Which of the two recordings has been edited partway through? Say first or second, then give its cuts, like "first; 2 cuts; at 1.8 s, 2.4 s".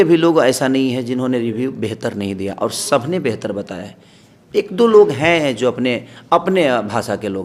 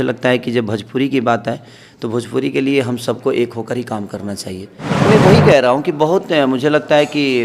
second; 1 cut; at 4.8 s